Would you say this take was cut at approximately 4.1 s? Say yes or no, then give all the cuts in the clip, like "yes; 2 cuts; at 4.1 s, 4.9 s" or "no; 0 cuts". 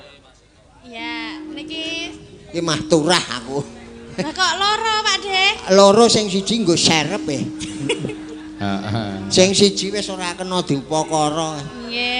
no; 0 cuts